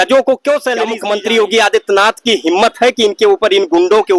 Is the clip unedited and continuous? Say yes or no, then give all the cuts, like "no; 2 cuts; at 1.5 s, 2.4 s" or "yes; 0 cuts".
no; 1 cut; at 1.0 s